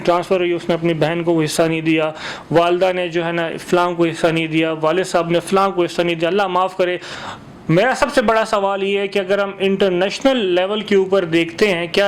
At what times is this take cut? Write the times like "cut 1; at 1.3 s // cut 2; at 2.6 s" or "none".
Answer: cut 1; at 7.1 s